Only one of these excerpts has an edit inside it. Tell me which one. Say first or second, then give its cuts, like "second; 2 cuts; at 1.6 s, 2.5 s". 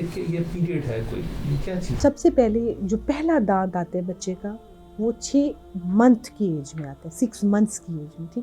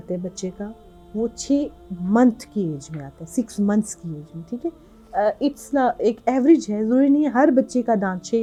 first; 1 cut; at 1.9 s